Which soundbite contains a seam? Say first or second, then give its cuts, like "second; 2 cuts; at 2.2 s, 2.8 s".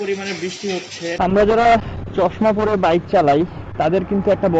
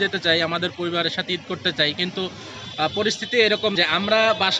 first; 1 cut; at 1.2 s